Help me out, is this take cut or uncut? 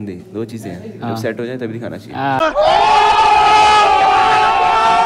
uncut